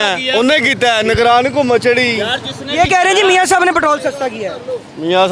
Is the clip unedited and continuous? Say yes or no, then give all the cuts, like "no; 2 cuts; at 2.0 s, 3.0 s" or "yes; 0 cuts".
yes; 0 cuts